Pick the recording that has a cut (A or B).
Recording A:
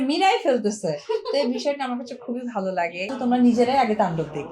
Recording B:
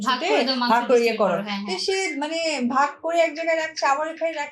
A